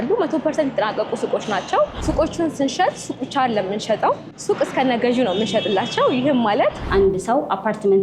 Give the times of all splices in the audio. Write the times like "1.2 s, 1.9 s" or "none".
2.0 s, 4.3 s, 6.8 s